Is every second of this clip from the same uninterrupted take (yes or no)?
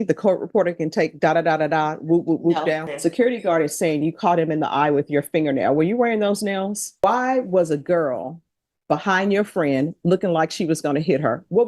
no